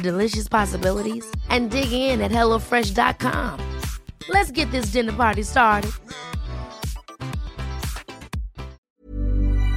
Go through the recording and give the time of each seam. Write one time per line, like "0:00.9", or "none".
0:08.8